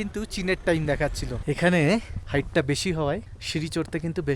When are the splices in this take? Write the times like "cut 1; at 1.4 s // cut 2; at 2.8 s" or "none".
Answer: cut 1; at 1.4 s // cut 2; at 2.2 s // cut 3; at 3.4 s